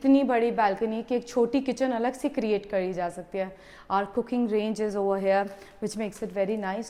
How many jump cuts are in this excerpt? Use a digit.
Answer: 0